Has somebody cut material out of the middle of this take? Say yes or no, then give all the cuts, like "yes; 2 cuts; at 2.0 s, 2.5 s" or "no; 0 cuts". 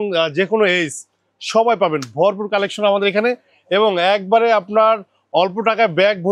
no; 0 cuts